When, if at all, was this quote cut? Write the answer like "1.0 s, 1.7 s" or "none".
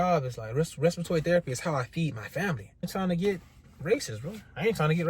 2.9 s